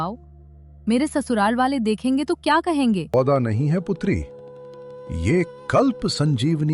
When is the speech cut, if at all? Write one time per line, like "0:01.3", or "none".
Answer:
0:03.1